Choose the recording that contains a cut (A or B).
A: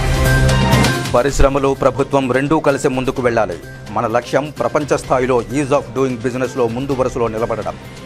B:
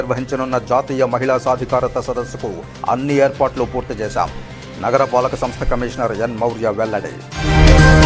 A